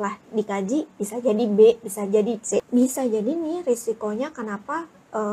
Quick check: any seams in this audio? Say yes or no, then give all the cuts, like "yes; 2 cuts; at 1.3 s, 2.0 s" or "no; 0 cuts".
yes; 1 cut; at 2.7 s